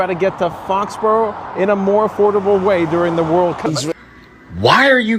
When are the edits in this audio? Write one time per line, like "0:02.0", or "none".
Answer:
0:03.7